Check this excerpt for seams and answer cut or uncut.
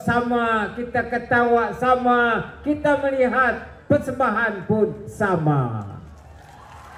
uncut